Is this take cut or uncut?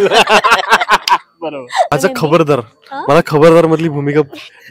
cut